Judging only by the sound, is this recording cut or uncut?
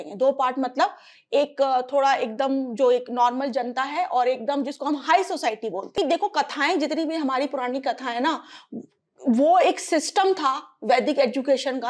cut